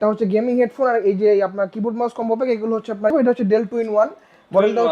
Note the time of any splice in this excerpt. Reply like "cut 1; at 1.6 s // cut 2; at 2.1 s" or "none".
cut 1; at 3.1 s